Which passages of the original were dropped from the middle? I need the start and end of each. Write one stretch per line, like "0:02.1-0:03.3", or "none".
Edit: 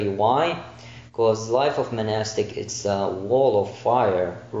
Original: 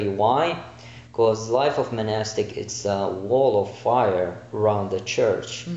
none